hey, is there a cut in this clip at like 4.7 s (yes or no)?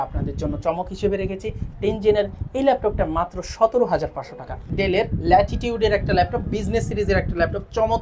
yes